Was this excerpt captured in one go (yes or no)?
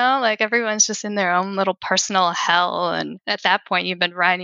no